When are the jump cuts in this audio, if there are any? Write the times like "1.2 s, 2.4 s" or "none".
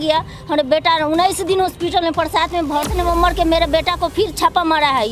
2.9 s